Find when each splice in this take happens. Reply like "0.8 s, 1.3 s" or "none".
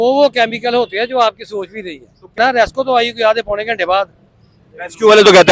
2.4 s